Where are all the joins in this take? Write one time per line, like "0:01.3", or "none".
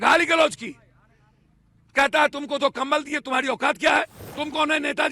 0:04.2